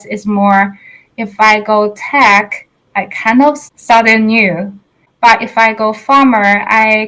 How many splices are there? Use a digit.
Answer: 2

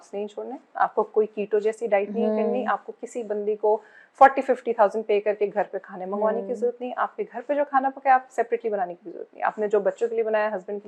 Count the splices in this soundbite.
0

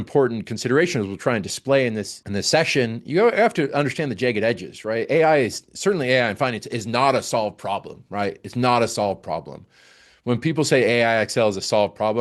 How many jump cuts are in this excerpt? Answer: 1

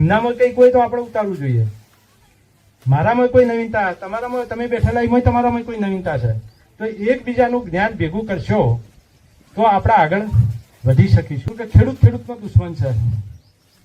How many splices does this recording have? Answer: 1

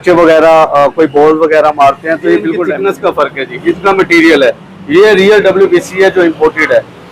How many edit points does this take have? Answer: 1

